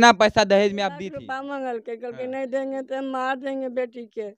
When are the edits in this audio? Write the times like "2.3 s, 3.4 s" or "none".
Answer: 1.0 s